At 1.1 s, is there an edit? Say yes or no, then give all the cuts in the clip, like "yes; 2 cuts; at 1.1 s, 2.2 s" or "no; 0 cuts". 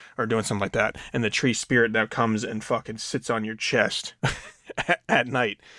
no; 1 cut; at 4.1 s